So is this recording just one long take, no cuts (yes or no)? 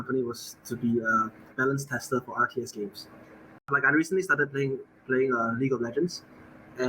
no